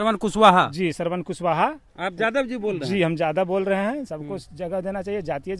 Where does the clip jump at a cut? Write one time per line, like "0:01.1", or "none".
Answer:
0:04.1